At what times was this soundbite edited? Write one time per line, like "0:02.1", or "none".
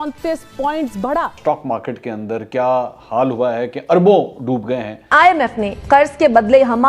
0:01.6
0:05.1